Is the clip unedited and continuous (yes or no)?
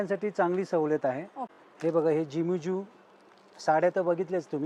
yes